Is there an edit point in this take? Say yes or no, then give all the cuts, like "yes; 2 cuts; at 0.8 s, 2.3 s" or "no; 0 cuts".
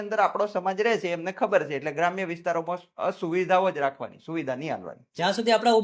no; 0 cuts